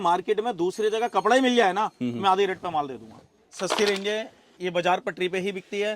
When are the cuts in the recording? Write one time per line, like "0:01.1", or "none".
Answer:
0:03.6